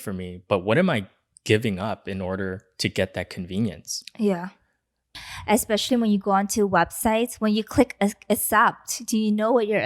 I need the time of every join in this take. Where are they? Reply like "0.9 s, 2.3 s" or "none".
5.1 s